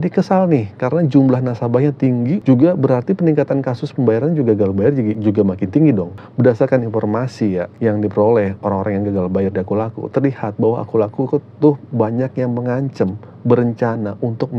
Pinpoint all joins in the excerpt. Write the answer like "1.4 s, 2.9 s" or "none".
2.4 s, 5.2 s, 6.2 s, 7.7 s